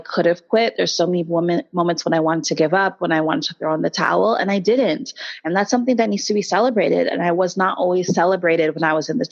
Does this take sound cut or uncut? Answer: uncut